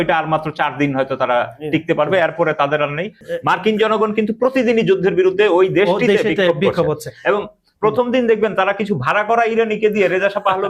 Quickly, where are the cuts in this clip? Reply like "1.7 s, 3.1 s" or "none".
3.2 s